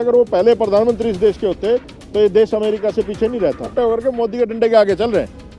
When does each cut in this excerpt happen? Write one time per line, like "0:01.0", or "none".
0:03.7